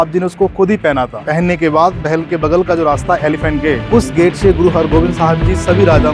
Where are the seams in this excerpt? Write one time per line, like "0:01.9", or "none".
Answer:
none

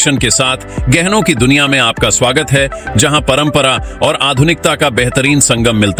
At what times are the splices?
none

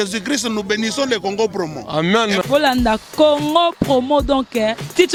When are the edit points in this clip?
none

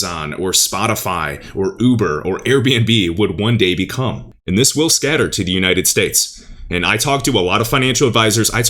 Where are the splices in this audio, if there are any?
0:04.3

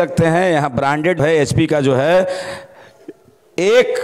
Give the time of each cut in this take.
0:01.2

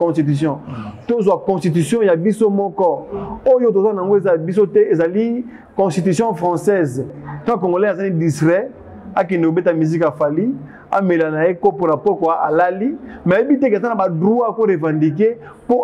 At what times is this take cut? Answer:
0:07.2

